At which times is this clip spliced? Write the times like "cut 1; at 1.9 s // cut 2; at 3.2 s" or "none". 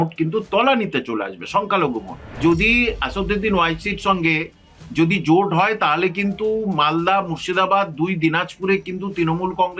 cut 1; at 2.4 s // cut 2; at 4.8 s